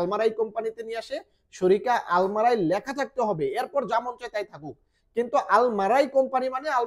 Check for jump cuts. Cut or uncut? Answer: uncut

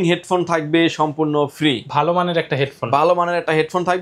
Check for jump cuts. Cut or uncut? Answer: uncut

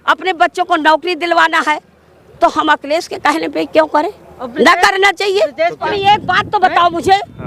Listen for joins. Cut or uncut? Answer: cut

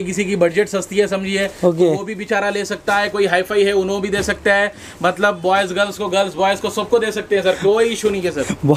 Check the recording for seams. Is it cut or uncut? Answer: uncut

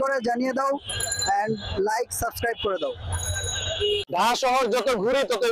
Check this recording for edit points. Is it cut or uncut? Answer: cut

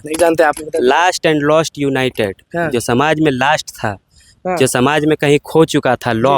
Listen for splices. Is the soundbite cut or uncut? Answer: uncut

